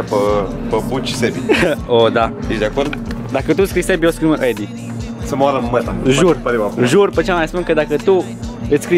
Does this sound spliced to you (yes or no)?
no